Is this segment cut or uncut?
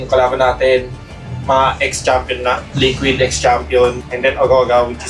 cut